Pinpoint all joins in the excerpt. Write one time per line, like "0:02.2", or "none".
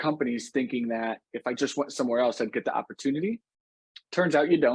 none